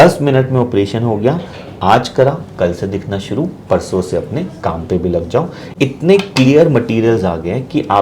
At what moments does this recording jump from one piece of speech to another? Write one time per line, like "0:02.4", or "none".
0:05.6